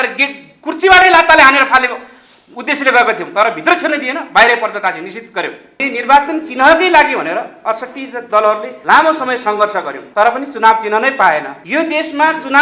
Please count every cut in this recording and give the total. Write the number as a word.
four